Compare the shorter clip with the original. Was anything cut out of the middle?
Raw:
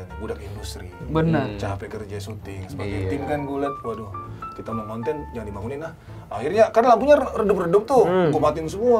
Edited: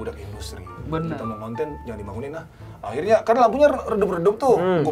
yes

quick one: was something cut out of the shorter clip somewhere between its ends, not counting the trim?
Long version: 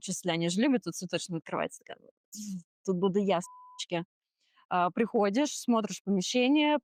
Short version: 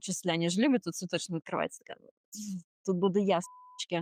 no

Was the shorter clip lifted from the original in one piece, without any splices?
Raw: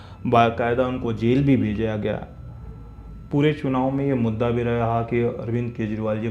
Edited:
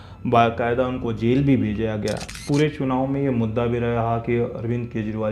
no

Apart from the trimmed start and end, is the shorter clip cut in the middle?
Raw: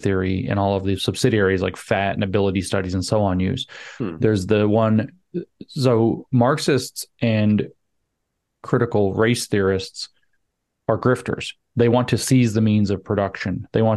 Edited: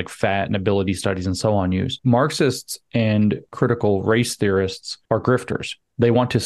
yes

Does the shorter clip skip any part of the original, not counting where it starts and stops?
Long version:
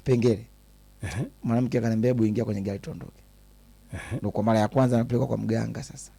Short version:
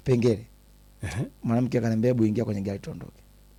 no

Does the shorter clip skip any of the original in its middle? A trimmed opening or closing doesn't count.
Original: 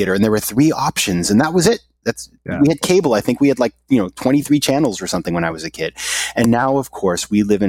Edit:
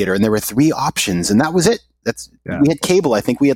no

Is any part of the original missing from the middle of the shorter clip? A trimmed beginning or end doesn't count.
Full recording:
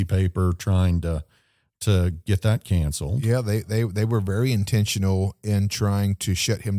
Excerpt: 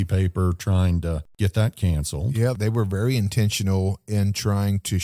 yes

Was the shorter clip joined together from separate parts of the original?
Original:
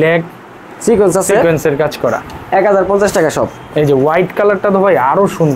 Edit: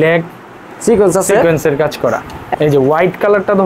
yes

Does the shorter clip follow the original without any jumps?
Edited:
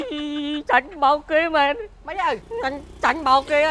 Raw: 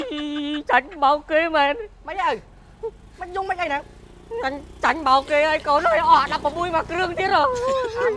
no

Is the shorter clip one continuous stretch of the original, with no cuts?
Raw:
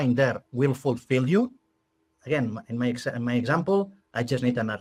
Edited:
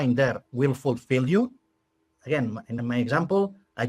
no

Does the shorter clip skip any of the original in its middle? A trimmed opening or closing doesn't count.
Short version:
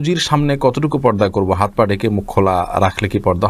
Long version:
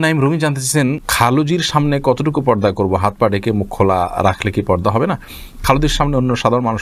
no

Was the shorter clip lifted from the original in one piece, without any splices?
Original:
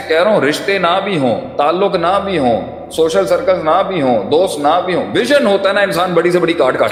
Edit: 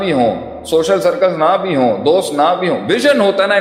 yes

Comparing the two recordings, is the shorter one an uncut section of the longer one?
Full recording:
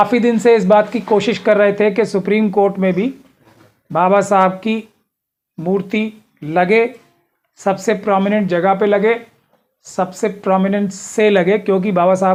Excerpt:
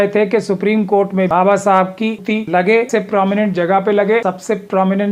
no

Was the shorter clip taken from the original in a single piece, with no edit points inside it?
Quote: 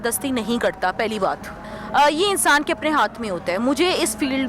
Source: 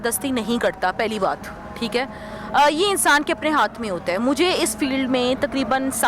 no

